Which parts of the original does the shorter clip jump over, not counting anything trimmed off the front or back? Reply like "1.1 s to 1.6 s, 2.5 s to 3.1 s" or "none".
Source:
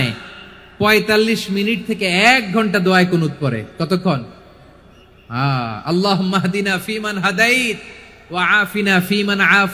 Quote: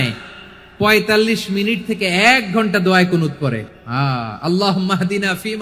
3.7 s to 5.1 s

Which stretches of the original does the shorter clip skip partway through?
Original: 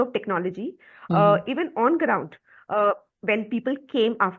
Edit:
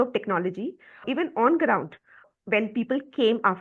1.0 s to 1.4 s, 2.7 s to 3.0 s

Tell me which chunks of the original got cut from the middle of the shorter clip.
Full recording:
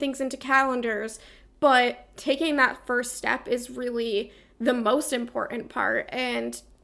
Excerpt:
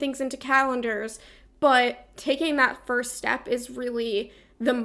none

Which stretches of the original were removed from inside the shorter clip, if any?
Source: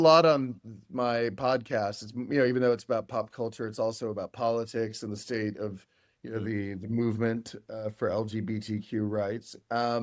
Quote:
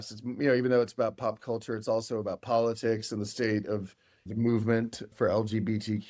6.1 s to 6.8 s, 7.7 s to 7.9 s

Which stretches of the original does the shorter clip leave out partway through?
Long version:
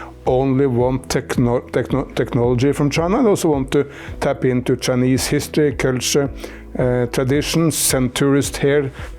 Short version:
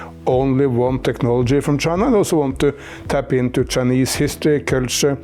1.0 s to 2.1 s

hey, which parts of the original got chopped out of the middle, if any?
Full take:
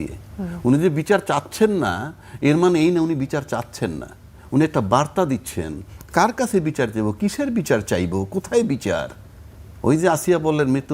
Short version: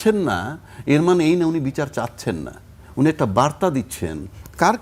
none

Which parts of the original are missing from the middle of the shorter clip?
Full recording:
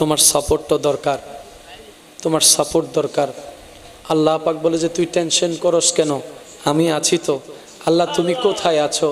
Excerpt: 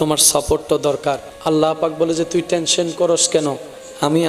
1.3 s to 3.9 s

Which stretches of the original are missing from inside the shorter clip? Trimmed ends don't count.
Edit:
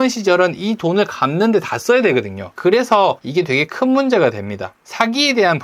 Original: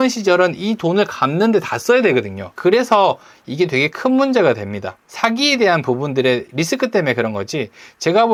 3.2 s to 3.5 s

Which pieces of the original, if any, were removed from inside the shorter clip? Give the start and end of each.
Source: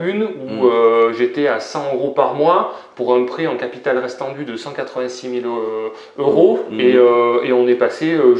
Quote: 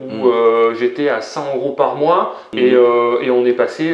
2.9 s to 6.7 s

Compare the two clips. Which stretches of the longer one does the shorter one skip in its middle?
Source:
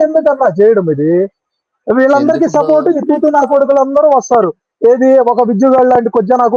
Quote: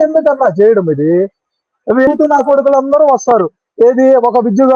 2.1 s to 3.1 s

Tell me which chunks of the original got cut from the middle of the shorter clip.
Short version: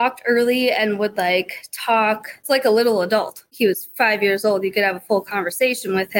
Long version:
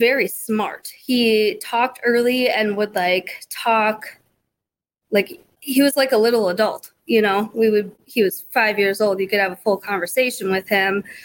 4.2 s to 5.9 s, 6.9 s to 8.0 s

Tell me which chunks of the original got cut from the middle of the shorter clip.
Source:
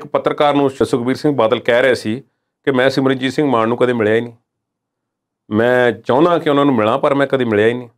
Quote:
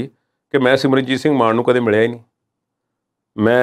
none

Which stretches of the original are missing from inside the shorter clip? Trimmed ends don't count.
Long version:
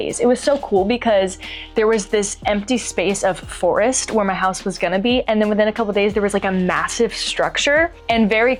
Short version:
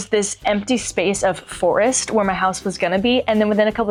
none

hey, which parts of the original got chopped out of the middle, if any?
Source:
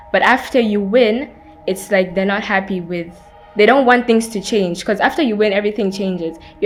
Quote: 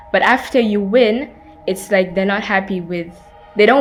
none

